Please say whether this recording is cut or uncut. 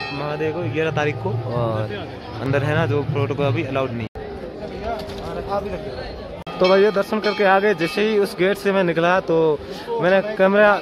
uncut